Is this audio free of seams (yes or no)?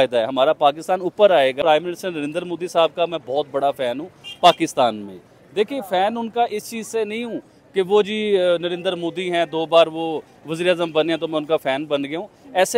no